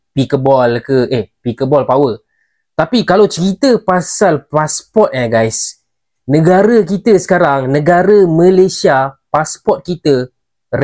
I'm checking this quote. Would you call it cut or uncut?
uncut